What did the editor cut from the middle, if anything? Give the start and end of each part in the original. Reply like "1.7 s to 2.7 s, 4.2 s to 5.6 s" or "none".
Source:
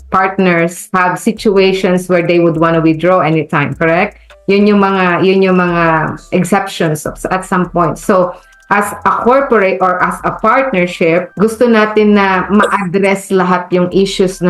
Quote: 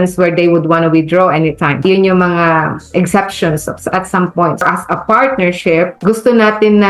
3.7 s to 5.2 s, 8.0 s to 10.0 s